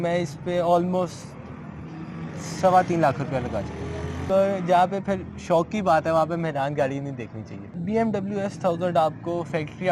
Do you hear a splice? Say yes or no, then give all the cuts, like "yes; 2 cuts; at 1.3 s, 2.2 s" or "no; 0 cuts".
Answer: yes; 2 cuts; at 4.2 s, 7.6 s